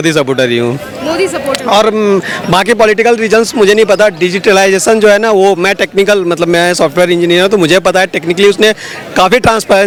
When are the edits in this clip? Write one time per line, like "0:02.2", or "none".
none